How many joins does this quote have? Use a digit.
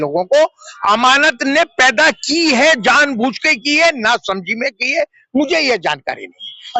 0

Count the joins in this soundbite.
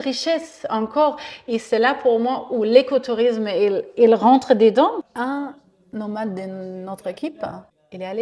1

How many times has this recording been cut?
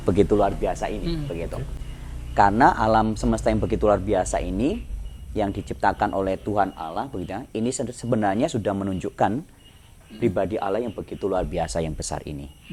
0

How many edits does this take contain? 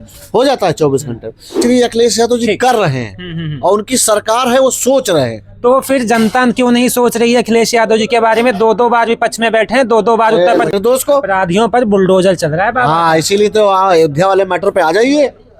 2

